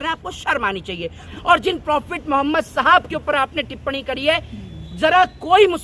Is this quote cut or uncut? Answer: cut